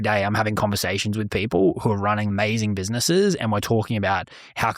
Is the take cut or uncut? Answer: cut